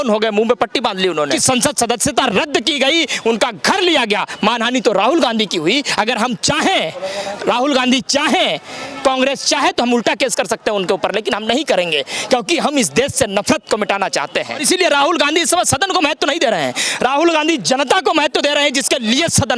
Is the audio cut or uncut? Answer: cut